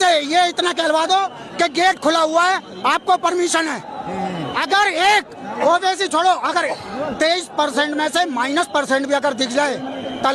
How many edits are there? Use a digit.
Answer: 0